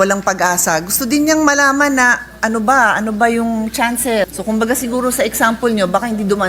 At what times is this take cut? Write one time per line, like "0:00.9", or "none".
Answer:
0:04.3